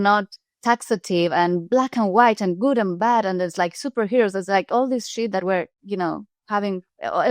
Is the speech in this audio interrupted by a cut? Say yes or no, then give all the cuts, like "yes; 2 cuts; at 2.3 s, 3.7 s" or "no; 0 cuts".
no; 0 cuts